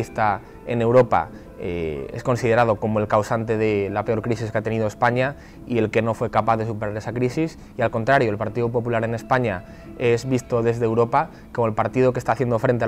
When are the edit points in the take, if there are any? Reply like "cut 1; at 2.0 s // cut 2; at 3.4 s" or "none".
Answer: none